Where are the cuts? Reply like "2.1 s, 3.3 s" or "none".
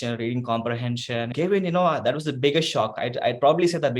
1.3 s